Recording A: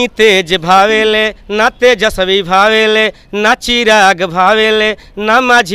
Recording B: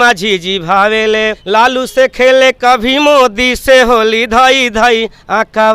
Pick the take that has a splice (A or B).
B